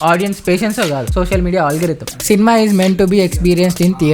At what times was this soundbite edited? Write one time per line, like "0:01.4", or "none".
0:02.1